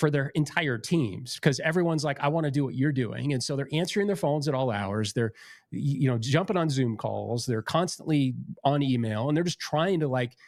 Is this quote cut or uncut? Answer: uncut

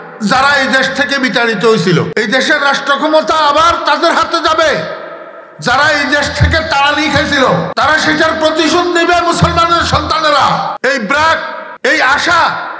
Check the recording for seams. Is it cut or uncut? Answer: cut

